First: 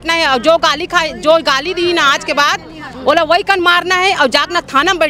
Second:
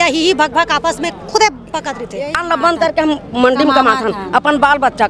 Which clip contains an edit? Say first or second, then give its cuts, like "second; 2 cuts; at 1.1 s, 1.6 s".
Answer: second; 1 cut; at 2.4 s